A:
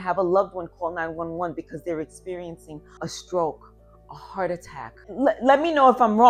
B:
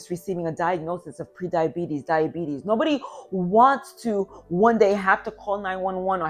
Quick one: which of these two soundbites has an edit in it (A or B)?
A